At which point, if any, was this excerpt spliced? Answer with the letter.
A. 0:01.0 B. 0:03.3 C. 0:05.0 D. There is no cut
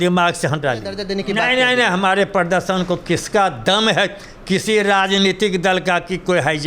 A